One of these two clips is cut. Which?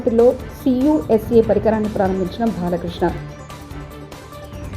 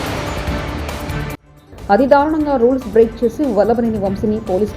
second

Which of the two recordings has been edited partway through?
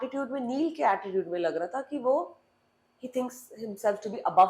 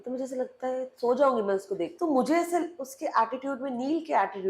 second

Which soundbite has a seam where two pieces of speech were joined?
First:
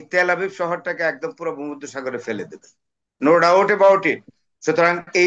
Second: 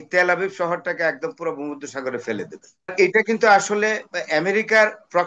second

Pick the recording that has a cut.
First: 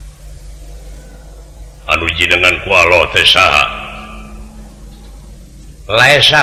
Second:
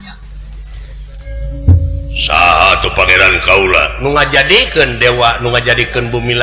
second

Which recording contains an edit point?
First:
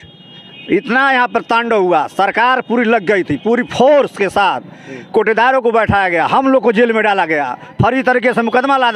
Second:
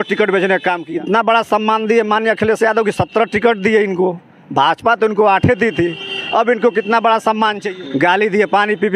second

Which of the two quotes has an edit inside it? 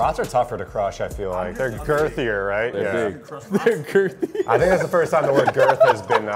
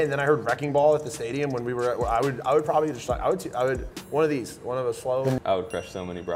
second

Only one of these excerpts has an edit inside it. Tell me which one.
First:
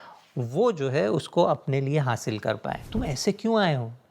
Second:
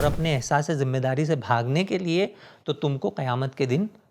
first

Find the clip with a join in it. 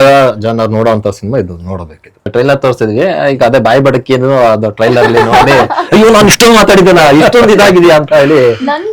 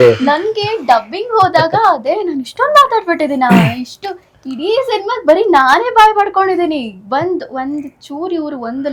first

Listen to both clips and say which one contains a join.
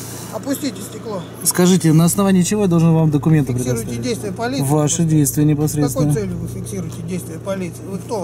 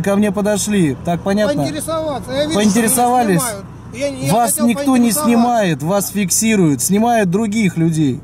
first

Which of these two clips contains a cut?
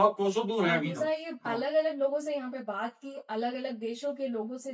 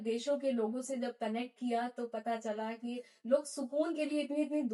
first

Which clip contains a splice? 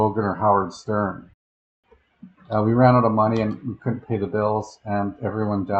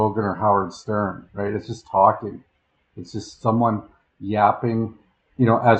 first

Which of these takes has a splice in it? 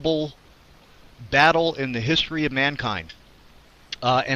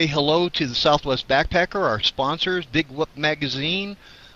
first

